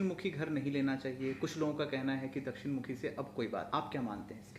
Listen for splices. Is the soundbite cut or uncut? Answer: cut